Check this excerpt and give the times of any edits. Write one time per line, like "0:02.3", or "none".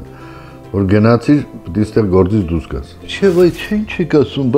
0:03.0